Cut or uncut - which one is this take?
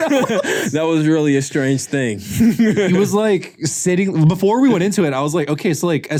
uncut